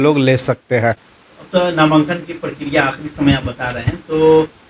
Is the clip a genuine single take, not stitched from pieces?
yes; 0 cuts

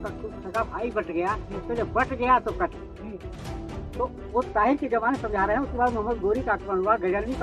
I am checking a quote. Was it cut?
no; 0 cuts

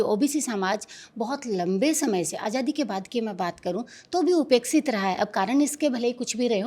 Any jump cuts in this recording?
no; 0 cuts

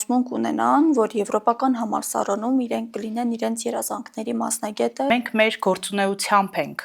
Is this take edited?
yes; 1 cut; at 5.1 s

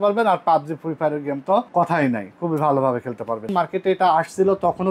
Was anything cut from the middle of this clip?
yes; 2 cuts; at 1.7 s, 3.5 s

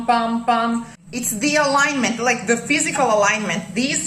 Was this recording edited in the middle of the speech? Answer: yes; 1 cut; at 1.0 s

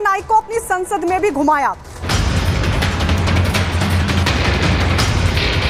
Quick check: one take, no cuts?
no; 1 cut; at 2.0 s

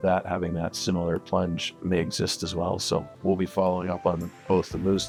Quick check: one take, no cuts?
yes; 0 cuts

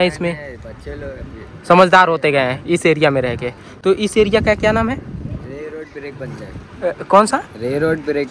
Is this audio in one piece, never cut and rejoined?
yes; 0 cuts

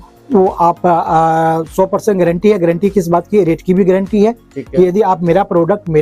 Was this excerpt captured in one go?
yes; 0 cuts

